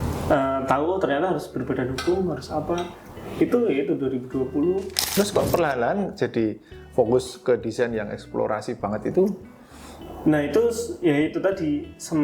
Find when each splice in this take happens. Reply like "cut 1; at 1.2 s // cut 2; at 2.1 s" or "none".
cut 1; at 5.0 s

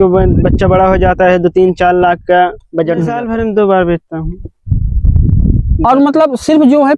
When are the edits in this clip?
cut 1; at 3.2 s

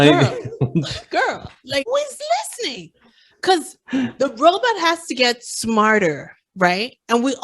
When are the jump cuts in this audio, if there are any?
cut 1; at 1.9 s

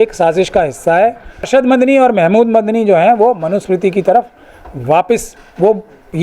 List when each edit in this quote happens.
cut 1; at 1.5 s

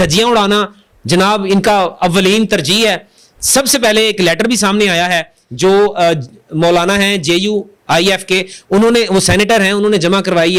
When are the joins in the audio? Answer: none

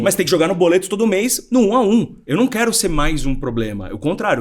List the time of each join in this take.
cut 1; at 2.2 s

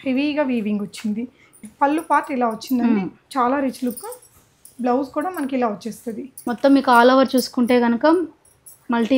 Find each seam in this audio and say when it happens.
cut 1; at 1.6 s // cut 2; at 6.4 s

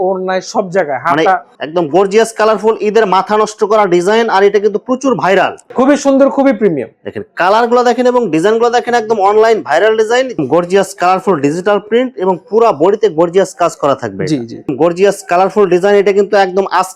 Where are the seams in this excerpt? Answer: cut 1; at 1.5 s // cut 2; at 5.7 s // cut 3; at 10.4 s // cut 4; at 14.6 s

